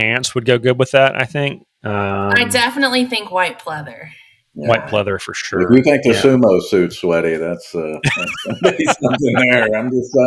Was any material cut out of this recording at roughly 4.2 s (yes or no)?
no